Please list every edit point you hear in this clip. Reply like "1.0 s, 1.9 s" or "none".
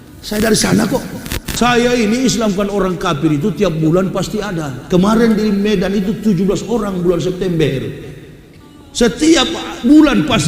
1.4 s